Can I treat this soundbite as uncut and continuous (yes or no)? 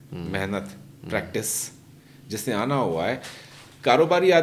yes